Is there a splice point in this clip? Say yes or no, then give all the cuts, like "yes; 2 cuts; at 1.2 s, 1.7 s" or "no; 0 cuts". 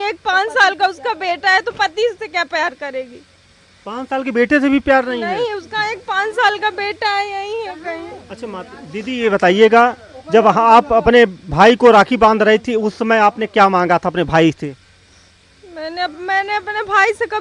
no; 0 cuts